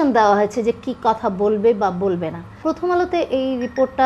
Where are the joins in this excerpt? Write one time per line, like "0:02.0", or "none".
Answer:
0:02.7